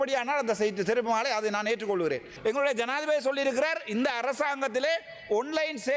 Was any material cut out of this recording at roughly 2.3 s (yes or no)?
yes